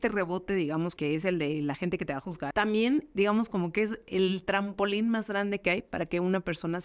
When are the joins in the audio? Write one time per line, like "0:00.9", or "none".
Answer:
0:00.9
0:02.4
0:03.1